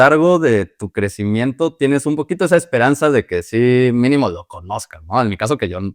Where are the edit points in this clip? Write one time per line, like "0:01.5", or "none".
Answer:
none